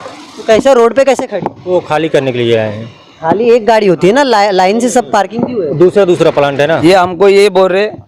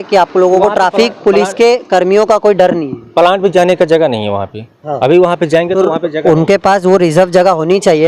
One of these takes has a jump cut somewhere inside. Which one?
first; 1 cut; at 6.8 s

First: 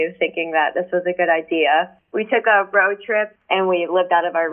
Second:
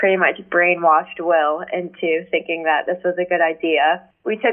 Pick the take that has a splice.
first; 1 cut; at 3.3 s

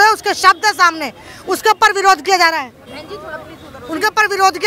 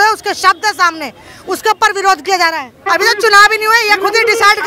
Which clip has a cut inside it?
second; 1 cut; at 2.8 s

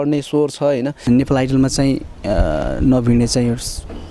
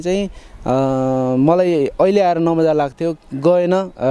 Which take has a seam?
first; 1 cut; at 1.0 s

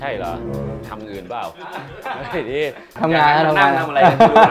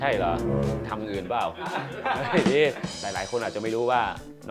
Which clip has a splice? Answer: second; 1 cut; at 2.9 s

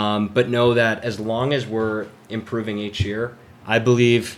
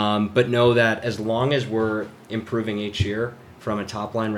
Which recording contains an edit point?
first; 1 cut; at 3.5 s

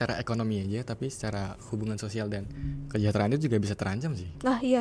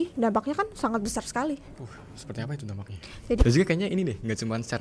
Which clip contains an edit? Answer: second; 1 cut; at 3.4 s

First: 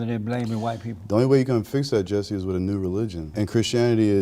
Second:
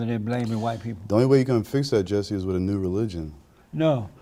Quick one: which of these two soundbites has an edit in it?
first; 1 cut; at 3.3 s

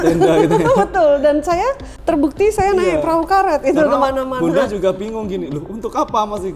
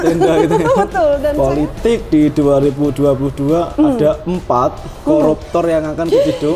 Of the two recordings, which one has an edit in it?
second; 1 cut; at 1.3 s

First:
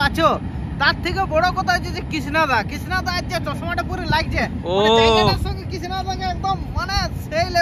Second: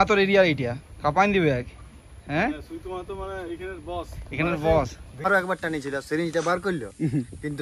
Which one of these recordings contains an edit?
second; 1 cut; at 5.2 s

